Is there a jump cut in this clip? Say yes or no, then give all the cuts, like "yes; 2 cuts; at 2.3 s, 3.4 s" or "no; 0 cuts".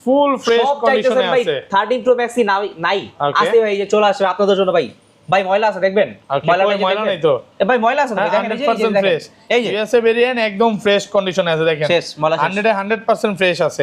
no; 0 cuts